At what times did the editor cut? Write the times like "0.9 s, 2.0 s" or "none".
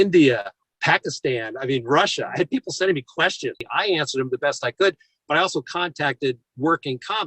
3.6 s